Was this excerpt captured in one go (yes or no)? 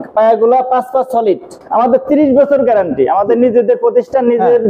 no